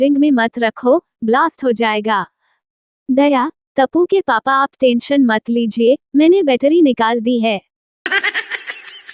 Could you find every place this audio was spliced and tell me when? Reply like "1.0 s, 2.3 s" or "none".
7.8 s